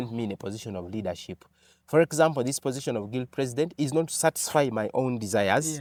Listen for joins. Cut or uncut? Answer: uncut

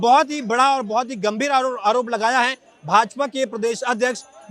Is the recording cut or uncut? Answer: uncut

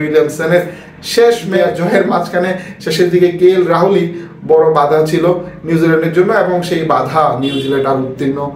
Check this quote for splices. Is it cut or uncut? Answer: cut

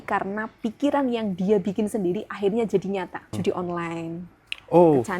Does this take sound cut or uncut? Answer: cut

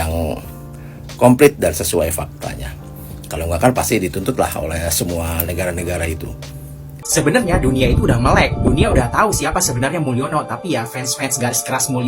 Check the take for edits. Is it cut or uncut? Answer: cut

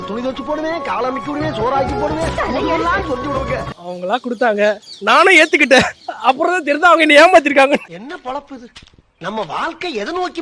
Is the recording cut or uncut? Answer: cut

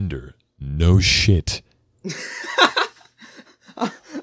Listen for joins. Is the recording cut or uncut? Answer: uncut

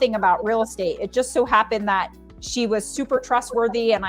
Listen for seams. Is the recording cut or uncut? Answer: uncut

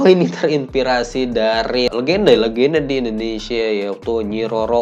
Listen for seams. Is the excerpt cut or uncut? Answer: cut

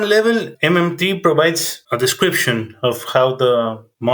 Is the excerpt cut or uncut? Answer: uncut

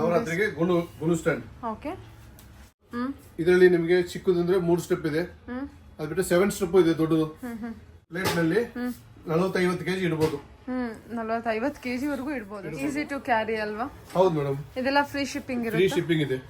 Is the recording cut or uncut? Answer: cut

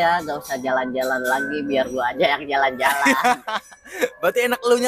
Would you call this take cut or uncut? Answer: uncut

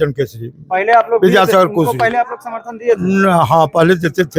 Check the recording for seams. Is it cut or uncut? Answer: uncut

